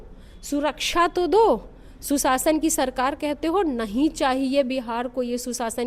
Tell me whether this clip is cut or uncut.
uncut